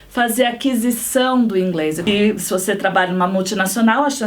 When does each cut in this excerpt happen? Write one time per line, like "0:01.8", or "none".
0:02.0